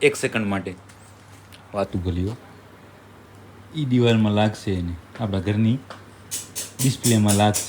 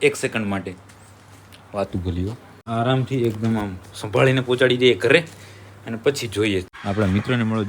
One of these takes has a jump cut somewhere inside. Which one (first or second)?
second